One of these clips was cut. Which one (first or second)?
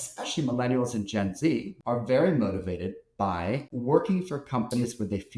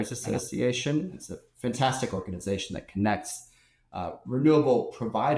first